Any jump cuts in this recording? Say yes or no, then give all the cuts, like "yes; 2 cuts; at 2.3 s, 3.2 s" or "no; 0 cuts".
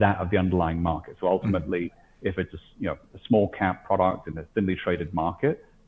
no; 0 cuts